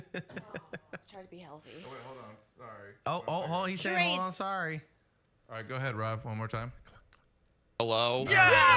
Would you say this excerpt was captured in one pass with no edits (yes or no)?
yes